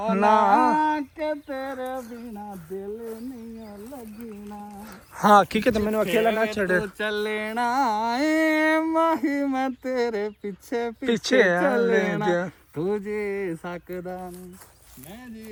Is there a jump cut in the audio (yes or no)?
no